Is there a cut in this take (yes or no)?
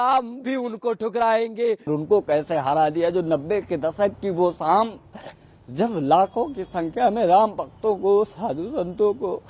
yes